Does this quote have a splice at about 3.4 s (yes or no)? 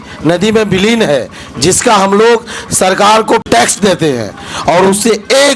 yes